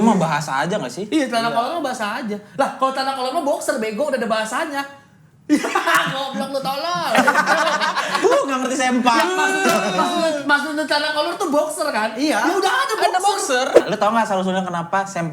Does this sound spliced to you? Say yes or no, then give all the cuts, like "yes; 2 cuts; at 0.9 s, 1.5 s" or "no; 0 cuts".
yes; 1 cut; at 13.8 s